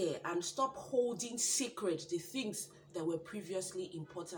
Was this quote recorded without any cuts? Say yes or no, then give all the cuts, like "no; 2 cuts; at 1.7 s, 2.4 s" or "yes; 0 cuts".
yes; 0 cuts